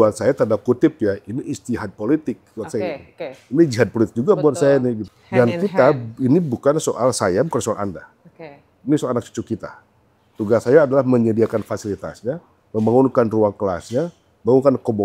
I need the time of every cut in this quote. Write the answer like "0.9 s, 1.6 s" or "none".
5.1 s